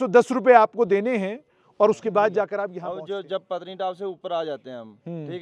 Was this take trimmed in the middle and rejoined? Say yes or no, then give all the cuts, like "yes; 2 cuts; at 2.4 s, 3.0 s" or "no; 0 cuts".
yes; 1 cut; at 2.8 s